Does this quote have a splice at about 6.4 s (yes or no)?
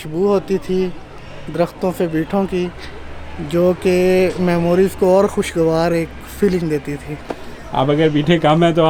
no